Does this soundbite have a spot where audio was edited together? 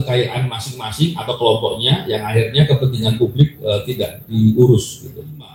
no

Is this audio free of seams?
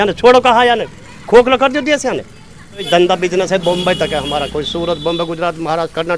no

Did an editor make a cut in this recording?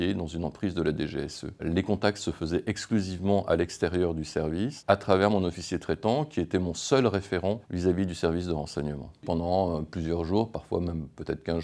yes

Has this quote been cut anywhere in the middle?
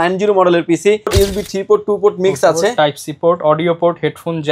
yes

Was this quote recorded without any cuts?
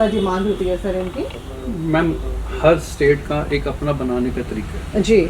yes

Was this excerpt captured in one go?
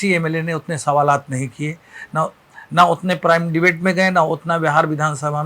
yes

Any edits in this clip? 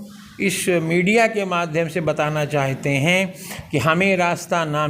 no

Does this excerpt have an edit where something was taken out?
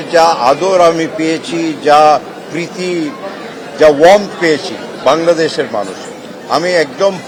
no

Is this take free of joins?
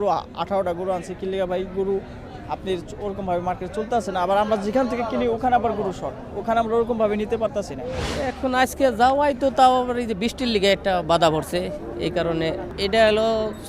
no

